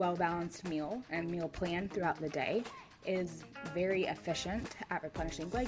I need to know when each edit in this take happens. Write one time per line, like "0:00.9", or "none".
none